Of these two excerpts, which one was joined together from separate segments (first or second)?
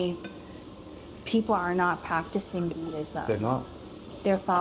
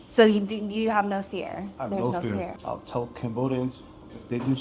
second